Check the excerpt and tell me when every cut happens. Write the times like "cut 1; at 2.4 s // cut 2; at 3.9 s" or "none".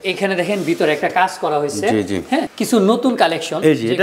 cut 1; at 2.5 s